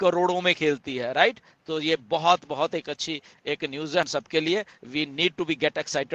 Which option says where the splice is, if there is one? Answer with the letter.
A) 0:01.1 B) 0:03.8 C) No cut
C